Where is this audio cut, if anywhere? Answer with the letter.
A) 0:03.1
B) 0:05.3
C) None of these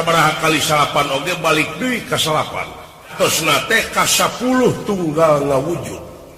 A